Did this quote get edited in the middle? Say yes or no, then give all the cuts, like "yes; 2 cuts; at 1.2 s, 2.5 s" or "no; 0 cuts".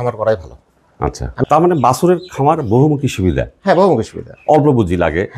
yes; 1 cut; at 1.4 s